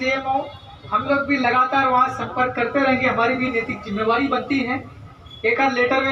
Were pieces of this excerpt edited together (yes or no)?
no